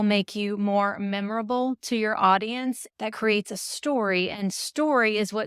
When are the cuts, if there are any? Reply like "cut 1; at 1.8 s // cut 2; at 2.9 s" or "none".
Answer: cut 1; at 2.9 s